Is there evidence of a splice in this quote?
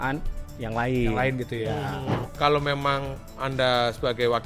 yes; 1 cut; at 2.1 s

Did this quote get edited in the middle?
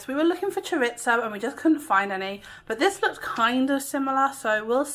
no; 0 cuts

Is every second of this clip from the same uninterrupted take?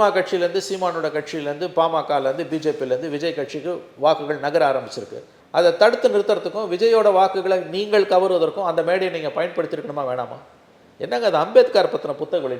yes; 0 cuts

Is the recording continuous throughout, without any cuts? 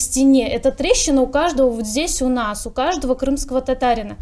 yes; 0 cuts

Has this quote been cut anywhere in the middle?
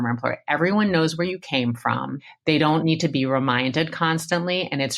yes; 1 cut; at 2.2 s

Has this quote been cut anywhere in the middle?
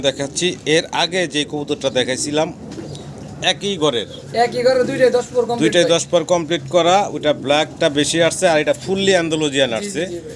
no; 0 cuts

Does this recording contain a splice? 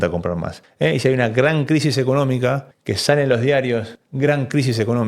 no; 0 cuts

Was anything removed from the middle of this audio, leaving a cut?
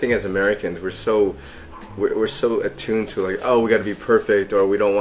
no; 0 cuts

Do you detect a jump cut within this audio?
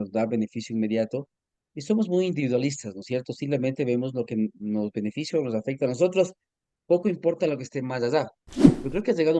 no; 0 cuts

